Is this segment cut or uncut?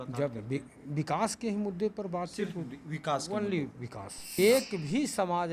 cut